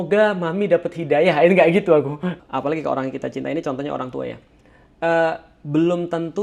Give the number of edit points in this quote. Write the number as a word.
one